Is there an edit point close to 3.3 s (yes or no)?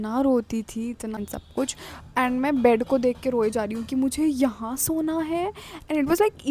no